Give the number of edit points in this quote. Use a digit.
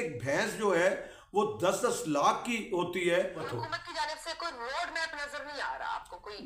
1